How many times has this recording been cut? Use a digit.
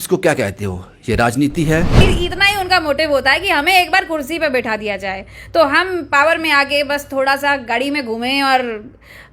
1